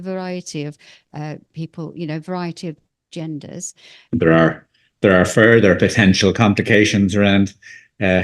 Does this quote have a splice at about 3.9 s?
yes; 1 cut; at 3.9 s

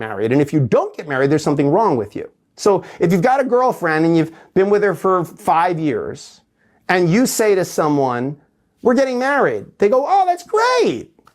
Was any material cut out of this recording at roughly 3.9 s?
yes; 1 cut; at 3.9 s

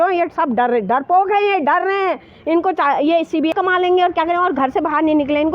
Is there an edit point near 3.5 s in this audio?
yes; 2 cuts; at 2.6 s, 3.5 s

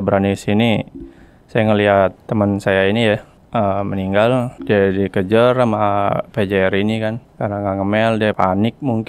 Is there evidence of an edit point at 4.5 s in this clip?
yes; 5 cuts; at 2.2 s, 3.3 s, 4.5 s, 7.3 s, 8.4 s

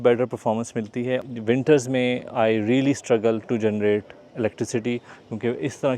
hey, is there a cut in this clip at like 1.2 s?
yes; 1 cut; at 1.2 s

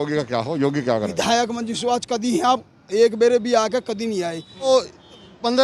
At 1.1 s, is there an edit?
yes; 2 cuts; at 1.1 s, 4.7 s

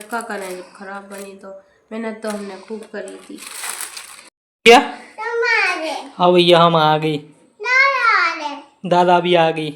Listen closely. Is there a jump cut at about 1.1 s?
no; 1 cut; at 4.3 s

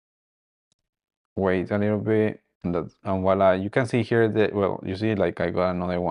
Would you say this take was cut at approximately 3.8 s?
no; 1 cut; at 2.5 s

